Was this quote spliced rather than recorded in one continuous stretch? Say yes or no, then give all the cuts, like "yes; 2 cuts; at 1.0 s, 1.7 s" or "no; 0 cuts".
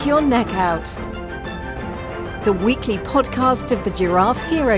no; 0 cuts